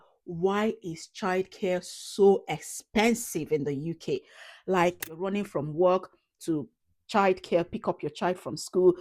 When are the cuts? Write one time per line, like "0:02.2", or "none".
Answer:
0:05.2

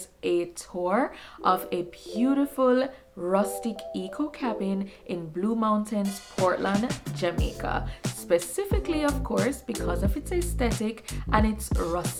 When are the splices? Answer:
none

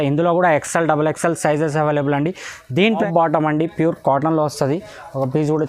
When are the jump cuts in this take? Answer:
0:03.0

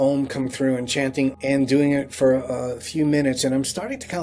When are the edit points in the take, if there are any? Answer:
0:01.4

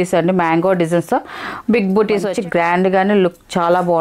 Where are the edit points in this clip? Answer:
0:02.3

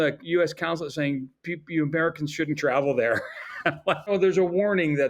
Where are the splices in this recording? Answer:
0:04.1

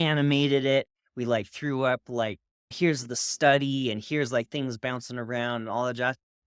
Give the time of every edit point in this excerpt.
none

